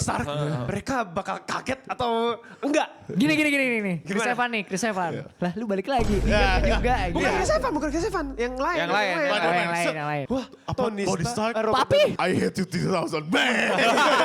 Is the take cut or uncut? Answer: cut